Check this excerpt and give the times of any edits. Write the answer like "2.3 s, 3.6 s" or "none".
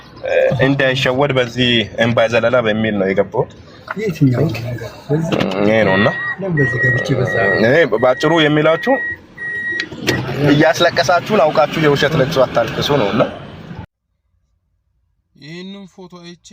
13.8 s